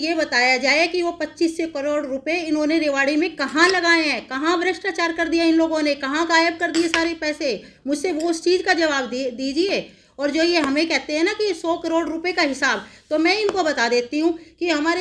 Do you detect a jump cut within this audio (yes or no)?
no